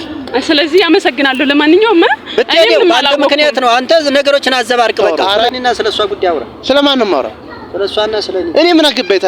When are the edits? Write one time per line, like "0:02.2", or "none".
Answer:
0:05.5